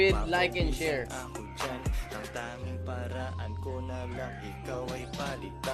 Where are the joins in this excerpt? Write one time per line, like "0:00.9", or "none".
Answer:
none